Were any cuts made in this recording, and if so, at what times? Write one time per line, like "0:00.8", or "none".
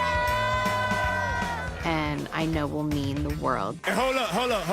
0:03.8